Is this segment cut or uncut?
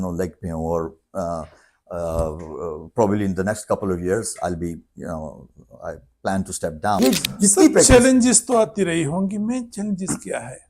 cut